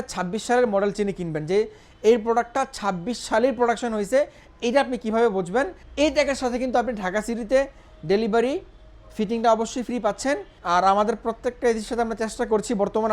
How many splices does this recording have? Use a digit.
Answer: 2